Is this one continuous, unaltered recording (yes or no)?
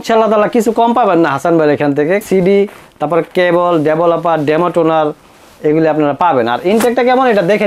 no